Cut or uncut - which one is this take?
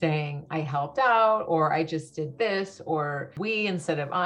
cut